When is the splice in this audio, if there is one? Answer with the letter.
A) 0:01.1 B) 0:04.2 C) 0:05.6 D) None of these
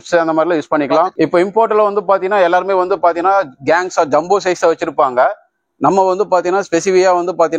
A